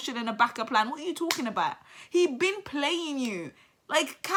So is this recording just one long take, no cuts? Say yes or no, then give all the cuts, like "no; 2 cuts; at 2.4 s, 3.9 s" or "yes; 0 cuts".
yes; 0 cuts